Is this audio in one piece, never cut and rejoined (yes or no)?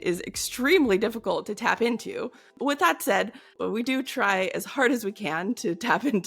no